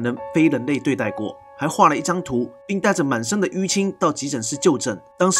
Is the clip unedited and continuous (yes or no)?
yes